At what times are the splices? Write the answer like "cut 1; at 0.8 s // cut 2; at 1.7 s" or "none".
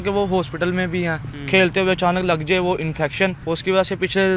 cut 1; at 1.3 s // cut 2; at 3.4 s